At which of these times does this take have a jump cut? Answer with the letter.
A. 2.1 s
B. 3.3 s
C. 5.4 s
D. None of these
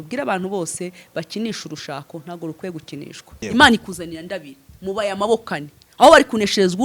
B